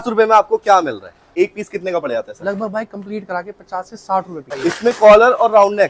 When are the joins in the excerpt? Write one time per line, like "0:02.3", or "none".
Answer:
0:01.2
0:04.5